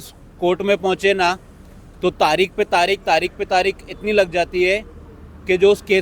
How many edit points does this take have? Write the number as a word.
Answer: zero